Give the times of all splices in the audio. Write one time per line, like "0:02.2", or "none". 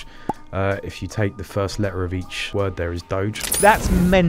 0:02.5
0:03.4

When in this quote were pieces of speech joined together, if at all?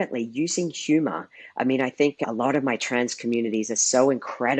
0:02.2

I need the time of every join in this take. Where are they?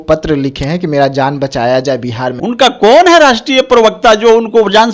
0:02.3

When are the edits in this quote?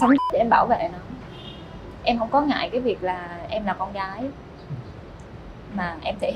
none

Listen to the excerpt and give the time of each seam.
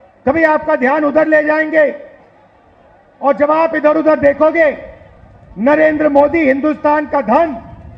none

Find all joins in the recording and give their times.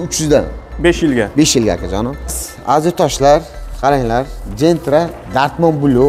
0:02.5

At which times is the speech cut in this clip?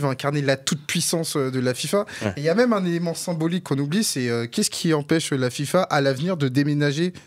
none

